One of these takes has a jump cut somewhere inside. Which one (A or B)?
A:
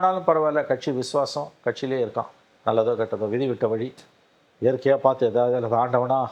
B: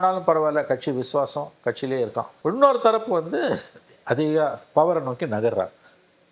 B